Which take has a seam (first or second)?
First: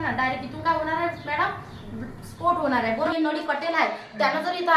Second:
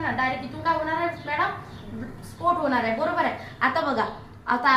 first